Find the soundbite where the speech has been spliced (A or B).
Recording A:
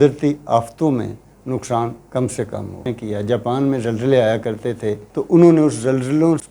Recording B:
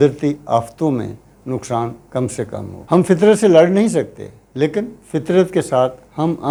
A